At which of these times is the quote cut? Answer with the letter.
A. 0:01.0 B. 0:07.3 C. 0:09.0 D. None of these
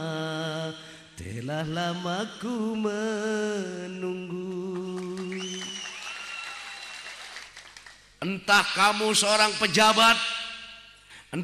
B